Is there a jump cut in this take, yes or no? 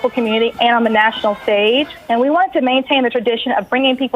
yes